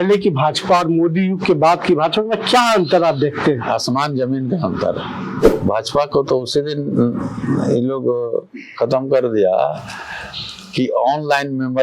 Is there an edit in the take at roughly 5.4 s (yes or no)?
yes